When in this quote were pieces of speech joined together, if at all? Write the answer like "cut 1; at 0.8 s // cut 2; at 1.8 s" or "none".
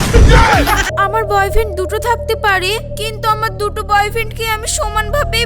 cut 1; at 0.9 s